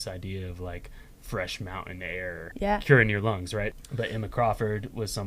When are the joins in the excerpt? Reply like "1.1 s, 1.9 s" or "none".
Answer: 2.5 s, 3.7 s